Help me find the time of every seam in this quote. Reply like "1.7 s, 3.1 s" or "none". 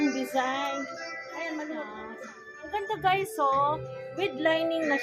2.0 s